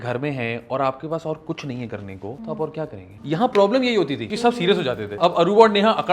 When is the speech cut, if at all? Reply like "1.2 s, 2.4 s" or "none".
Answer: 2.4 s, 3.1 s, 4.2 s, 5.1 s